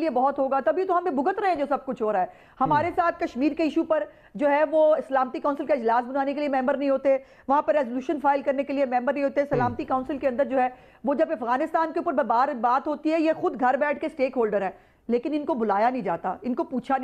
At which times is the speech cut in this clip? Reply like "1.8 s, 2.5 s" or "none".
none